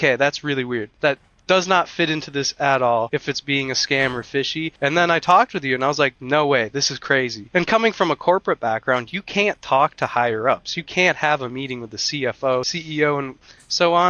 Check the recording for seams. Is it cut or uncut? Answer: cut